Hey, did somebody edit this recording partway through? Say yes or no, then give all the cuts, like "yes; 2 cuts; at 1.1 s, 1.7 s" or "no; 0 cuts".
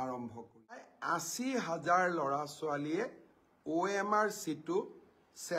yes; 1 cut; at 0.9 s